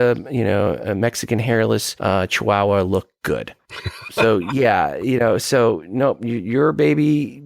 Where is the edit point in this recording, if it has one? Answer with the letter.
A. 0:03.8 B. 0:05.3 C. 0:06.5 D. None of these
A